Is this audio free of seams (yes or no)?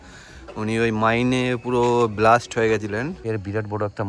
no